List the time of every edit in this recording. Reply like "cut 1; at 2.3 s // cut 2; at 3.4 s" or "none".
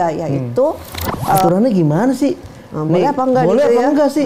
cut 1; at 1.4 s